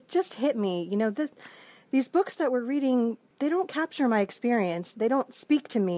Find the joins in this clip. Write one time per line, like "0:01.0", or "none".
0:03.3
0:04.9